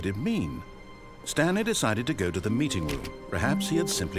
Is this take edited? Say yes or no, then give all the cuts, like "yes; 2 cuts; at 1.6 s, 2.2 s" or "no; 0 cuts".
no; 0 cuts